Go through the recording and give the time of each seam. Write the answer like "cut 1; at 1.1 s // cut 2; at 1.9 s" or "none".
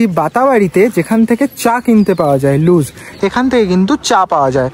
none